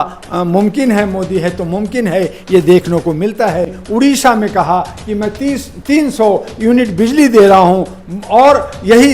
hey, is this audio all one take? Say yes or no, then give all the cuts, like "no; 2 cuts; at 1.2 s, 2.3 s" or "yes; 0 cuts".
no; 1 cut; at 3.8 s